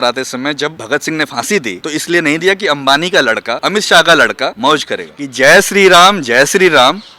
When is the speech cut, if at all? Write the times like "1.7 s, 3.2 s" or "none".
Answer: 0.8 s, 1.8 s, 3.6 s, 4.8 s